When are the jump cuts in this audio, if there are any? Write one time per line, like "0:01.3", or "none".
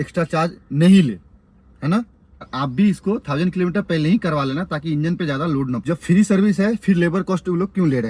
0:02.4
0:05.8

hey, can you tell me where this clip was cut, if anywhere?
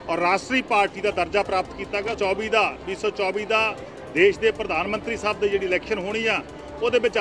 0:02.2

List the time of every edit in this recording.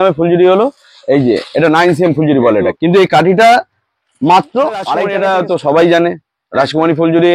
0:02.8
0:05.0

